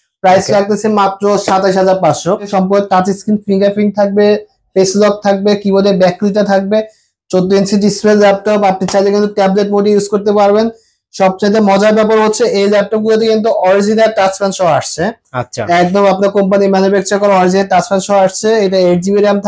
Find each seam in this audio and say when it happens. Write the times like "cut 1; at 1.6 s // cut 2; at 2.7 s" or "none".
cut 1; at 2.5 s

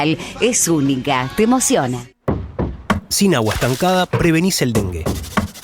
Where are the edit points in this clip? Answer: cut 1; at 2.1 s

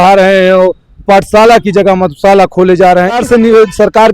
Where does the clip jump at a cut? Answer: cut 1; at 3.2 s

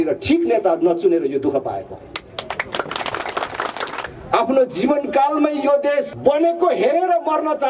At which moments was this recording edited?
cut 1; at 4.0 s // cut 2; at 6.1 s

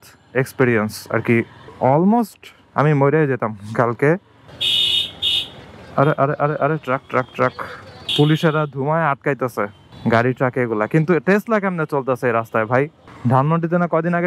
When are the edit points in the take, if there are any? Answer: cut 1; at 4.4 s

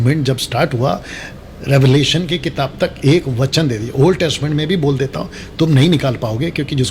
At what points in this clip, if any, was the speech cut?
none

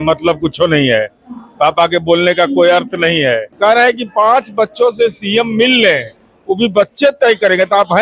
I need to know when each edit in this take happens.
cut 1; at 3.5 s

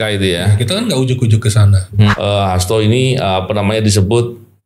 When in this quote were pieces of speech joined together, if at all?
cut 1; at 2.1 s

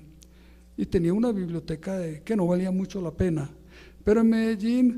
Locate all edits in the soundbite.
none

